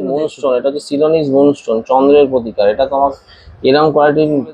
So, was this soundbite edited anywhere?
no; 0 cuts

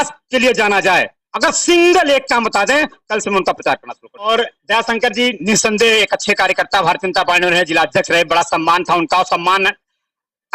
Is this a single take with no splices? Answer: no; 1 cut; at 4.3 s

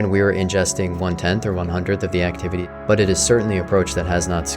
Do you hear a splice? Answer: yes; 1 cut; at 2.7 s

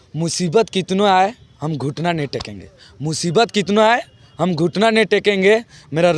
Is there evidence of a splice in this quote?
no; 0 cuts

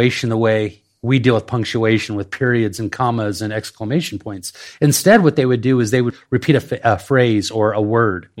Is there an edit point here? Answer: yes; 1 cut; at 6.2 s

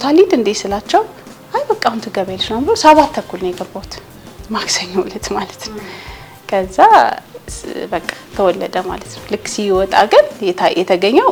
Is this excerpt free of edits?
yes; 0 cuts

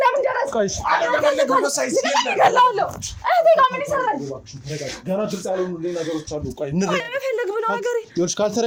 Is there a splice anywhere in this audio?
no; 0 cuts

